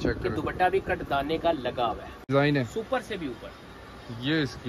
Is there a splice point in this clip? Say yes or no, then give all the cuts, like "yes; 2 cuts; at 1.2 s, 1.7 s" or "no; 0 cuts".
yes; 1 cut; at 2.3 s